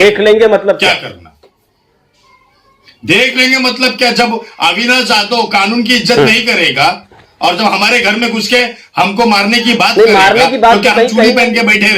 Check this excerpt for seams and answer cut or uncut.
uncut